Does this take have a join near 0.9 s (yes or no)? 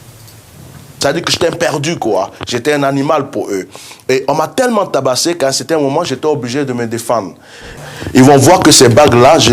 yes